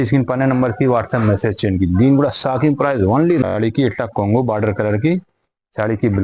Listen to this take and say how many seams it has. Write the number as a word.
one